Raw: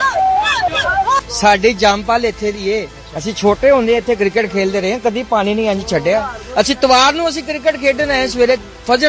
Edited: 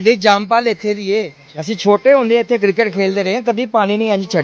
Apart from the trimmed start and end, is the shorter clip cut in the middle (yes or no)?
no